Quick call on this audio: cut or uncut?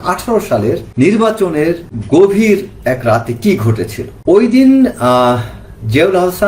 cut